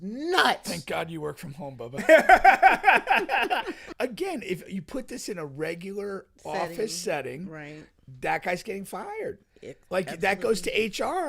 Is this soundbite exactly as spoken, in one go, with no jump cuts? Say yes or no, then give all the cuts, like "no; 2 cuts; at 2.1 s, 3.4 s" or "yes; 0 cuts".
no; 1 cut; at 3.8 s